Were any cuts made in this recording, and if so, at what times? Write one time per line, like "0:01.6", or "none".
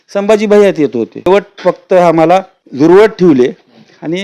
0:01.3
0:02.6